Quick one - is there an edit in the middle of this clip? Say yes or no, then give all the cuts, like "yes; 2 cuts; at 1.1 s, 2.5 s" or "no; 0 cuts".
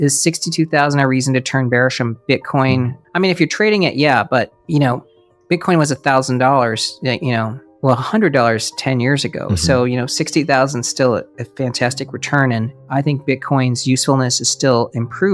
yes; 3 cuts; at 3.0 s, 7.6 s, 12.8 s